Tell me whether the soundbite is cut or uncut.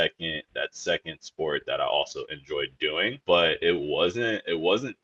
uncut